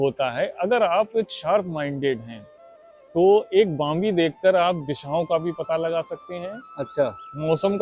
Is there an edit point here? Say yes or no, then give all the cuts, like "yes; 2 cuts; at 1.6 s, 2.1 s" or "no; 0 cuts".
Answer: no; 0 cuts